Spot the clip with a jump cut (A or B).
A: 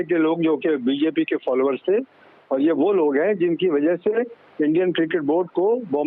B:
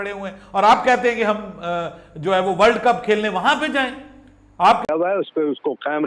B